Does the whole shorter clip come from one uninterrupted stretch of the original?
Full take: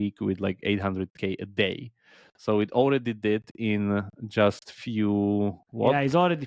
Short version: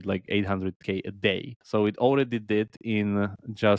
no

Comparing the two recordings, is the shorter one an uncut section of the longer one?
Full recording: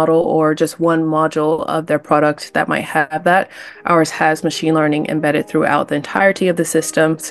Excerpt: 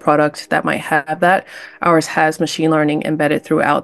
yes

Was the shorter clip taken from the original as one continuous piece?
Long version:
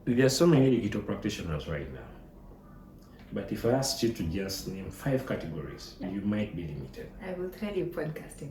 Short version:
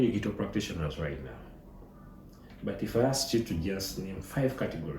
yes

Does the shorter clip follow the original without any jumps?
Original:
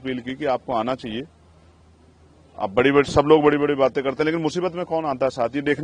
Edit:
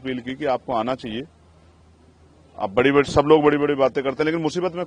yes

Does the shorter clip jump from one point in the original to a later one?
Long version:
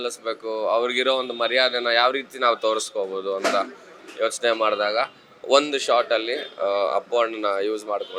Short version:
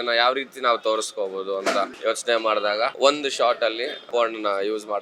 yes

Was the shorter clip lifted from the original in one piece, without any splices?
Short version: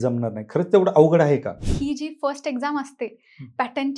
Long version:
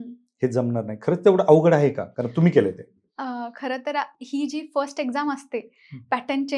no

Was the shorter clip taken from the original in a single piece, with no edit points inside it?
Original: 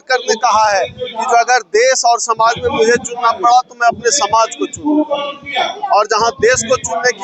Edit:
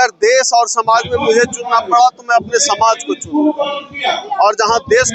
yes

